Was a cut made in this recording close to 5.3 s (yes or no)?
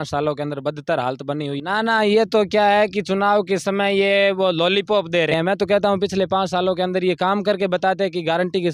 yes